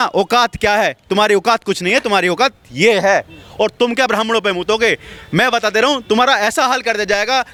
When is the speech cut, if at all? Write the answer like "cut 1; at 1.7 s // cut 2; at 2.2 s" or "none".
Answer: none

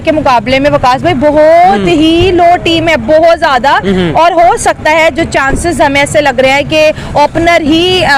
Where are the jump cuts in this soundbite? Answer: none

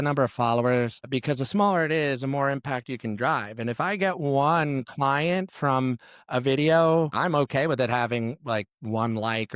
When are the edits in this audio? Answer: cut 1; at 1.1 s // cut 2; at 7.1 s

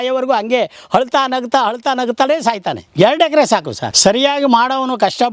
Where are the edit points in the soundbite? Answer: cut 1; at 2.8 s // cut 2; at 3.8 s

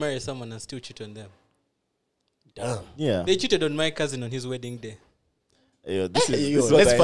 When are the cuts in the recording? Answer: none

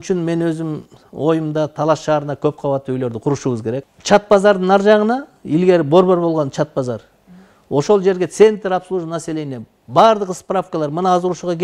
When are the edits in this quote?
cut 1; at 3.9 s

